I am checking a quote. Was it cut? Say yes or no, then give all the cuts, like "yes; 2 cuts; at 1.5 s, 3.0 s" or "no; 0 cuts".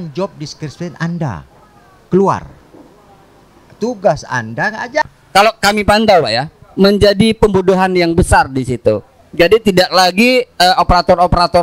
yes; 1 cut; at 5.1 s